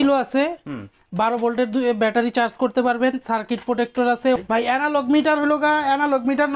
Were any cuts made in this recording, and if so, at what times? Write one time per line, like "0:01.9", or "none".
0:04.4